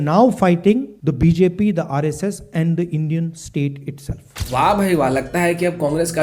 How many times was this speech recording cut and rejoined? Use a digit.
1